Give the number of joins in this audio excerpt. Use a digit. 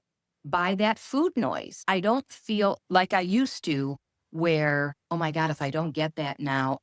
3